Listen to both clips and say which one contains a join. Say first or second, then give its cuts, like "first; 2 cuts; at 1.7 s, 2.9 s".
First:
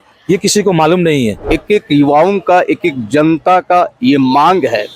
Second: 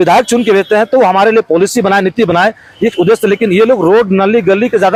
first; 1 cut; at 1.5 s